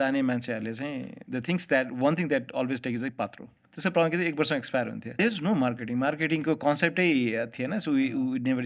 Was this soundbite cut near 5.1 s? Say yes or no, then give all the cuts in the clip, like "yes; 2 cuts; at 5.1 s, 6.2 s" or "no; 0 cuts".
yes; 2 cuts; at 3.6 s, 5.1 s